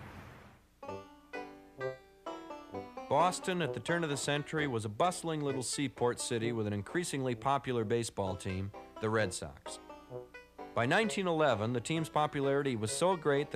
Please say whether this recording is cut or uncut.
cut